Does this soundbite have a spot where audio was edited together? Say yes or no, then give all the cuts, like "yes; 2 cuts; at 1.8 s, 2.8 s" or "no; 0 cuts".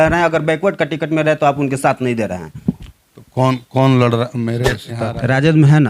yes; 1 cut; at 4.8 s